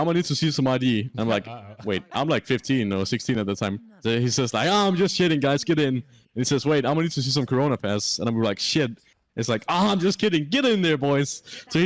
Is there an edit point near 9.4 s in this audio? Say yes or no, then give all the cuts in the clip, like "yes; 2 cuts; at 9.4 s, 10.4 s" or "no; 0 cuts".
no; 1 cut; at 1.1 s